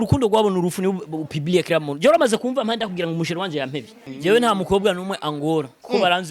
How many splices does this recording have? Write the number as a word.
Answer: one